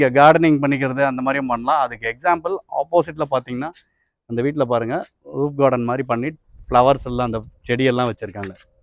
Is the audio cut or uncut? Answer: uncut